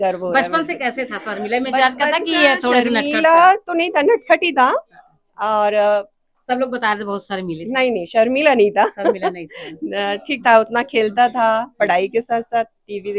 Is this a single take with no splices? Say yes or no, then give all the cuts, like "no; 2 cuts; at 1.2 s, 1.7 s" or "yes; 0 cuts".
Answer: yes; 0 cuts